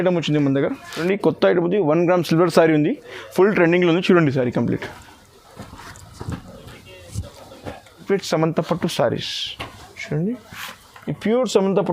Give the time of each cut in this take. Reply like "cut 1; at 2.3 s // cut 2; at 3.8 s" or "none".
cut 1; at 0.9 s // cut 2; at 8.0 s